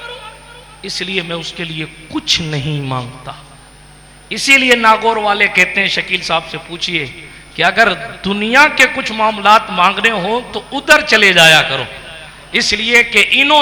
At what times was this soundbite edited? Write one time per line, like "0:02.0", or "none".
none